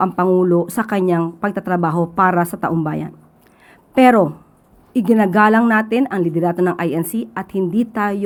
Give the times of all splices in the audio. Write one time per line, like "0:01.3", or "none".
none